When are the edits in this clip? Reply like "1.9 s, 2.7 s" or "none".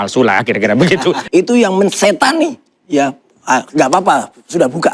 1.2 s

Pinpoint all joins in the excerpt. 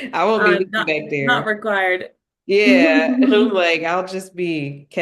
none

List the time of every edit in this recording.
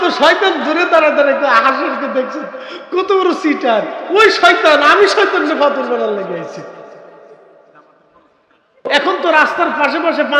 8.9 s

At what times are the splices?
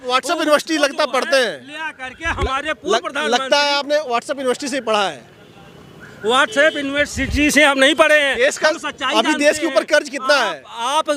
none

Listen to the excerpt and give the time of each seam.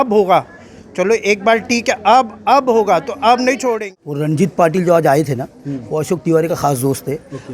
3.8 s

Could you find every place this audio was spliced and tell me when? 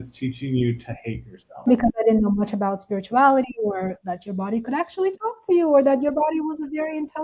1.7 s

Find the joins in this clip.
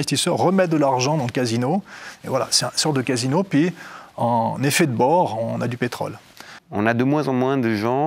6.6 s

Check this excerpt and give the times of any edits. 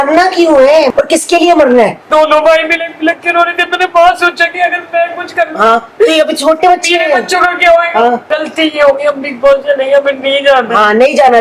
0.9 s, 2.1 s, 8.2 s

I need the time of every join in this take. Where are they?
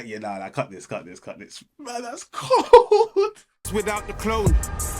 3.5 s

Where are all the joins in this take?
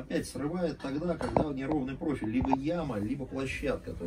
none

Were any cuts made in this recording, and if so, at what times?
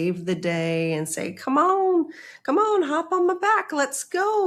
none

